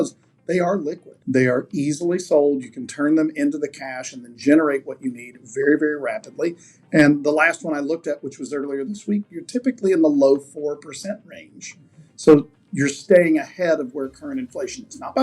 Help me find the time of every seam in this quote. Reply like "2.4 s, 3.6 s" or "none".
1.1 s